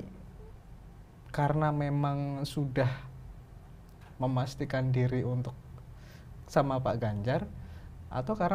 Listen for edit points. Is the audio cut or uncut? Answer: uncut